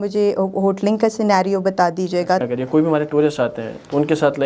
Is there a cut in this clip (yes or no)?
yes